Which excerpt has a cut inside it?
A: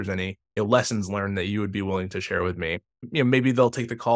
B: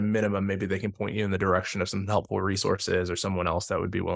A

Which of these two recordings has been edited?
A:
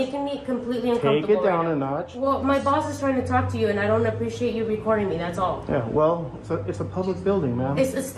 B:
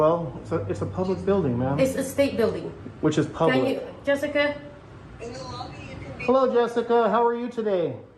A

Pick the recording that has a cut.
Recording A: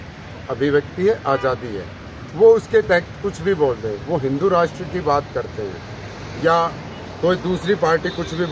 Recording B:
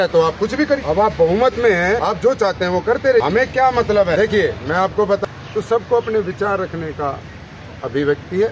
B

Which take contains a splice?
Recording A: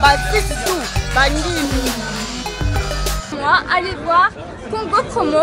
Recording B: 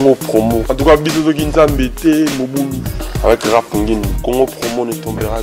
A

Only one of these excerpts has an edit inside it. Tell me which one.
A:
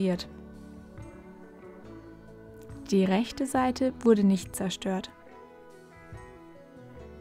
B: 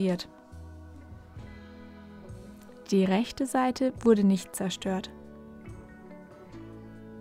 A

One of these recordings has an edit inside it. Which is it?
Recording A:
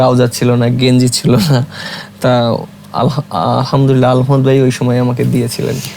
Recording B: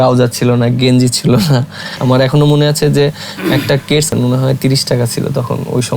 B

